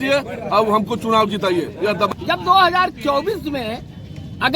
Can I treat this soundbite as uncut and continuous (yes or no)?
no